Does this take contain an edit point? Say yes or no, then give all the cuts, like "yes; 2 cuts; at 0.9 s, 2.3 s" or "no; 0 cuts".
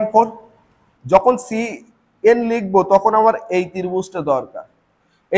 yes; 1 cut; at 1.3 s